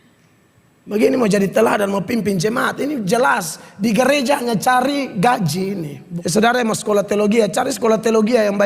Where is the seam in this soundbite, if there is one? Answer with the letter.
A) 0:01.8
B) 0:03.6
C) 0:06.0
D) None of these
C